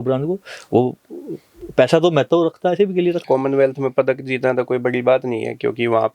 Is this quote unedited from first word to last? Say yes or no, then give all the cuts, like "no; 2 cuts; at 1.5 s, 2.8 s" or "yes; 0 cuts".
no; 1 cut; at 3.2 s